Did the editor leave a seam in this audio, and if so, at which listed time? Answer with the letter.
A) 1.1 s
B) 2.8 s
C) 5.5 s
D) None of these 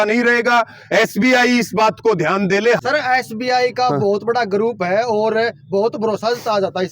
B